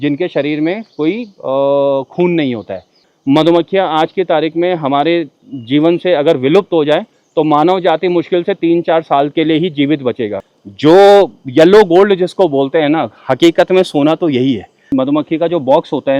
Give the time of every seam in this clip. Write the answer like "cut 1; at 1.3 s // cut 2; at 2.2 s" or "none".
cut 1; at 3.1 s // cut 2; at 10.4 s // cut 3; at 14.8 s